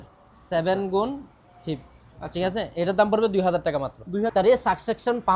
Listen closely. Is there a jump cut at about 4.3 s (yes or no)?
yes